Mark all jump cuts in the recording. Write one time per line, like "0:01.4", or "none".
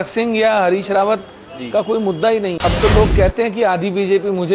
0:02.5